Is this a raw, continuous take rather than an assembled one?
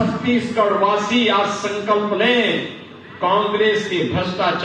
yes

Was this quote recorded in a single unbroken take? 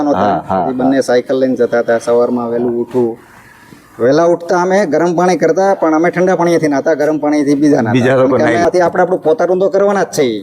no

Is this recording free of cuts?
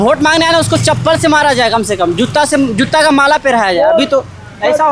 yes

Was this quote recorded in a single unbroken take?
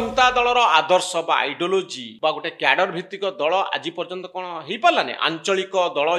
no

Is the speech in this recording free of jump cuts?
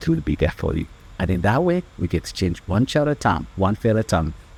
yes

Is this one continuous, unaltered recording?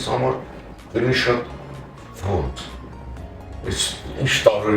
yes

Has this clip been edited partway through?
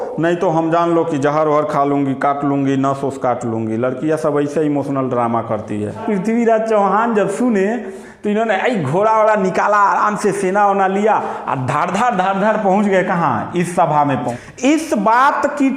yes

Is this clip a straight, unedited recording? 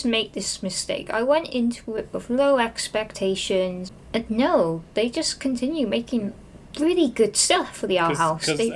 no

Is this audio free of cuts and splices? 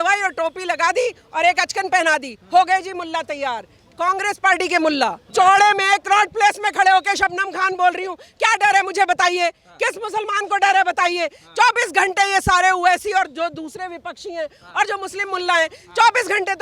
no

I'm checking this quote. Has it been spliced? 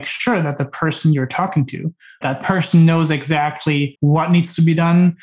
yes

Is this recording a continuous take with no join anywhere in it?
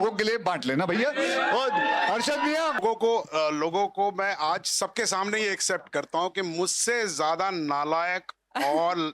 no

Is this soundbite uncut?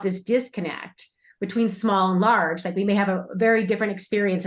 yes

